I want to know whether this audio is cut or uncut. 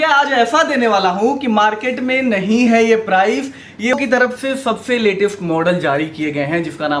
cut